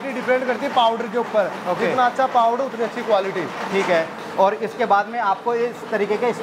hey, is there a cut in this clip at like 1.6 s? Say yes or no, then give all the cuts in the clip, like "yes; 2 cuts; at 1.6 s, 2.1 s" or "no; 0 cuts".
no; 0 cuts